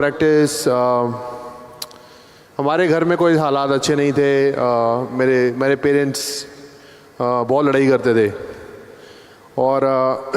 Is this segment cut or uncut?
uncut